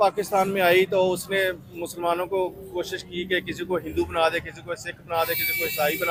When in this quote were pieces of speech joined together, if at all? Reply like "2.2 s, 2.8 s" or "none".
none